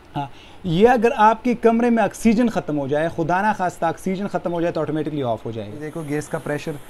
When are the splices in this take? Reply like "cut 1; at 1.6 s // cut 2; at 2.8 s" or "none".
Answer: cut 1; at 5.9 s